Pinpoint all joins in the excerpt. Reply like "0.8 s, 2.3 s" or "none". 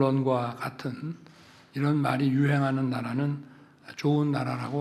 none